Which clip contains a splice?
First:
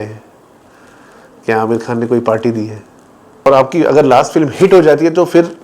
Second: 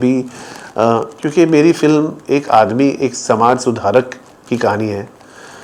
first; 1 cut; at 3.5 s

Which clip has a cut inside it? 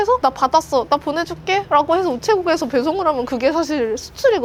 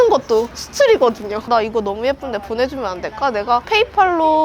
second; 2 cuts; at 1.3 s, 3.6 s

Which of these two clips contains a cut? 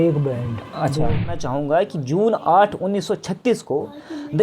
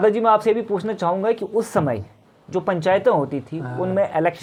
first; 1 cut; at 1.3 s

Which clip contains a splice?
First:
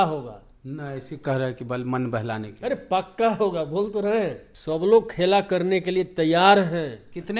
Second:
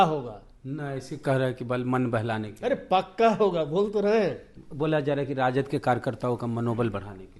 first; 1 cut; at 4.5 s

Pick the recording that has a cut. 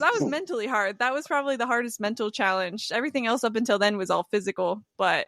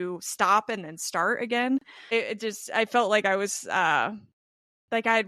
second; 1 cut; at 2.1 s

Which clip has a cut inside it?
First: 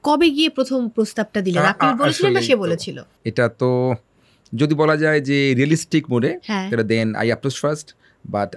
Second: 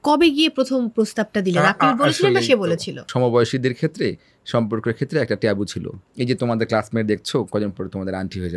second; 2 cuts; at 3.0 s, 6.0 s

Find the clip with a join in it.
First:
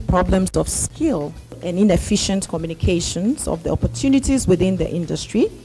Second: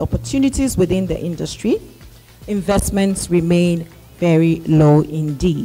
first; 1 cut; at 1.6 s

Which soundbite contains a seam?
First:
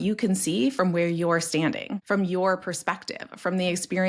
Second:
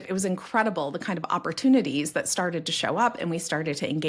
first; 1 cut; at 1.9 s

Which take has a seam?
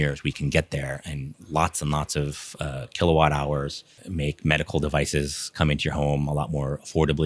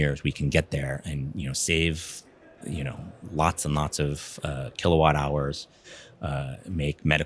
first; 2 cuts; at 1.3 s, 4.0 s

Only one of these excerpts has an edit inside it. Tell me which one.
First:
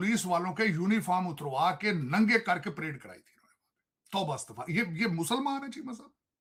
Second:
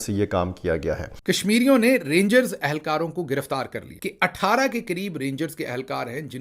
second; 2 cuts; at 1.1 s, 3.9 s

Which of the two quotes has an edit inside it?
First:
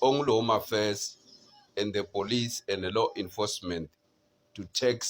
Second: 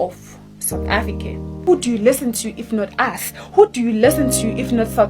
second; 1 cut; at 1.5 s

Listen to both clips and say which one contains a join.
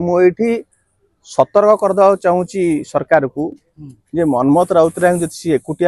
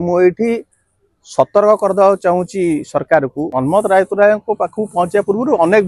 second; 1 cut; at 3.5 s

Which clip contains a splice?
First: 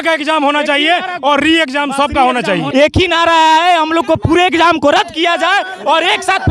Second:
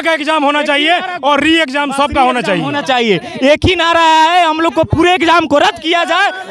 first; 1 cut; at 2.7 s

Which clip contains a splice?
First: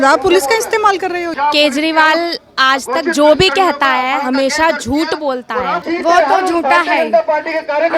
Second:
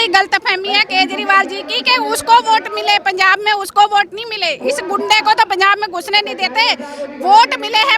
first; 2 cuts; at 1.2 s, 5.8 s

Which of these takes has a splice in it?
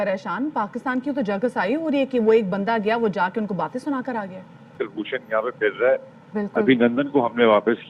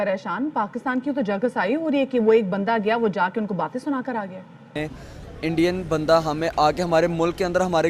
second; 1 cut; at 4.6 s

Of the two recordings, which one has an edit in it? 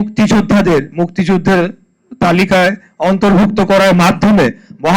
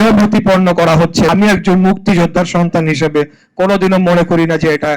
second; 1 cut; at 1.3 s

